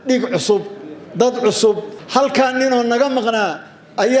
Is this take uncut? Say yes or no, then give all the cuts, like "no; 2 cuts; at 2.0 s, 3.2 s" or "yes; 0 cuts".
no; 1 cut; at 1.9 s